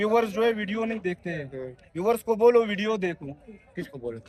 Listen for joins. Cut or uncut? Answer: uncut